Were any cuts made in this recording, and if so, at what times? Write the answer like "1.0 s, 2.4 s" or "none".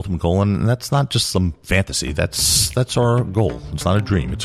none